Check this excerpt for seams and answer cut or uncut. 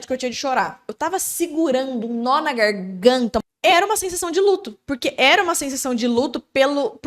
cut